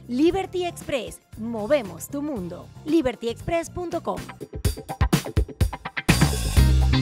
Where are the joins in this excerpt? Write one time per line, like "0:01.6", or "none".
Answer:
0:04.3